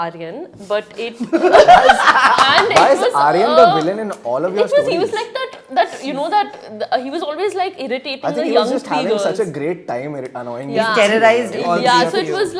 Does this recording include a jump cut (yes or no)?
no